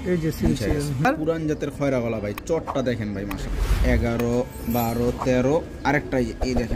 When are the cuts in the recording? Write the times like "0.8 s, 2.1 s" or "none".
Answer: 1.1 s, 3.5 s